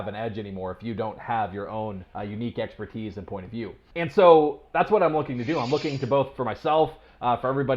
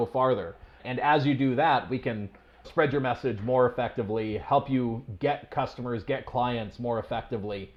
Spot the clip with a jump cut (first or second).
first